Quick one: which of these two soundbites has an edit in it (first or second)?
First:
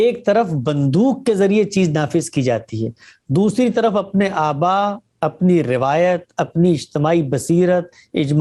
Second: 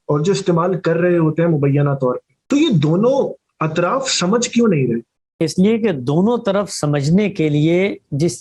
second